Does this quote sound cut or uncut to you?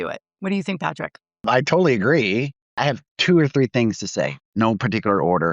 cut